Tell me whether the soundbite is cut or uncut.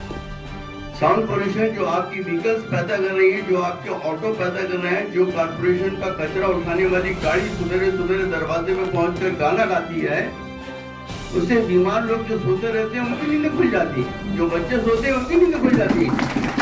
cut